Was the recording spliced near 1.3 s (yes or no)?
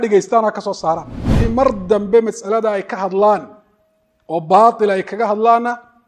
yes